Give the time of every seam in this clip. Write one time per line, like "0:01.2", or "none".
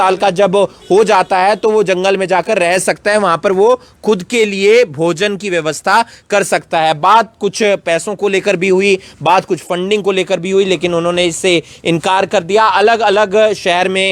none